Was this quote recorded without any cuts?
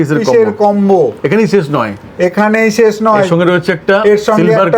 yes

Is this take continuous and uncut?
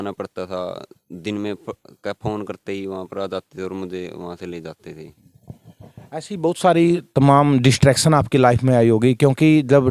yes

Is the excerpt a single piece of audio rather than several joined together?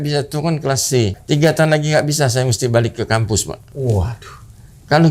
no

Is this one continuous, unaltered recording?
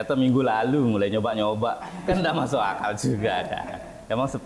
yes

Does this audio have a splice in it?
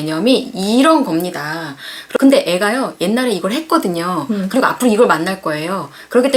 no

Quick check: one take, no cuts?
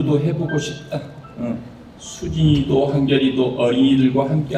yes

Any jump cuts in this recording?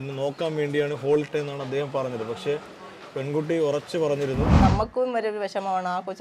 yes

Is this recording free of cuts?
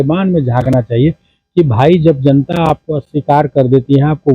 yes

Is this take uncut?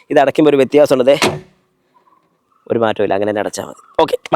yes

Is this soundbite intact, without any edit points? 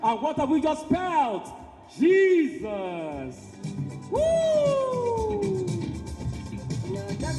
no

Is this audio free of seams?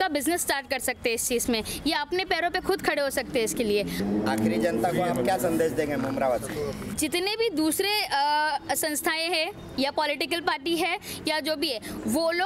yes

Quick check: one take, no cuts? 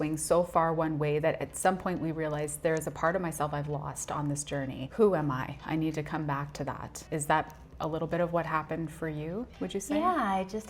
no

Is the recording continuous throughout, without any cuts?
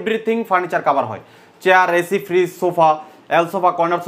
yes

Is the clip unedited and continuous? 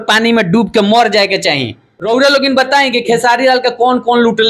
no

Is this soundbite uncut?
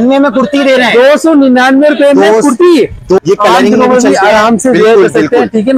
no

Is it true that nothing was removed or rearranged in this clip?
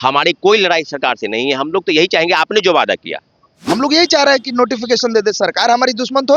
no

